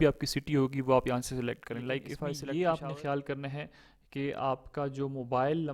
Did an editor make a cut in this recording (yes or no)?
yes